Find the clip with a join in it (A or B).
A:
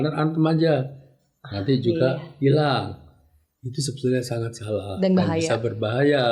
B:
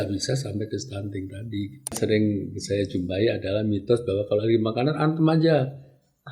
B